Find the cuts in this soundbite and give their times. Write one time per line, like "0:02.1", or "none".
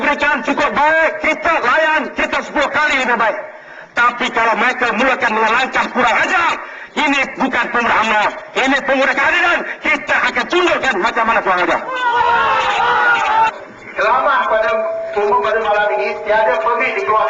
0:13.5